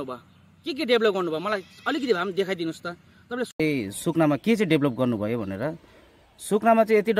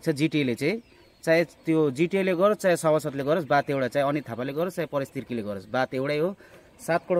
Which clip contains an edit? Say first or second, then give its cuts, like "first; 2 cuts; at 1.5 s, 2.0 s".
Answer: first; 1 cut; at 3.6 s